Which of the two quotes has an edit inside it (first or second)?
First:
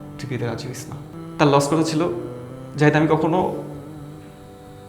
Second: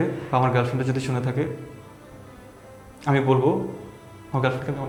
first